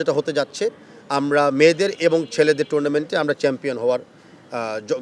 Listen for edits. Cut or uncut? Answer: uncut